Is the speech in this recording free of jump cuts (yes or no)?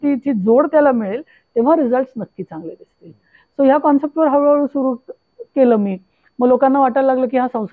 yes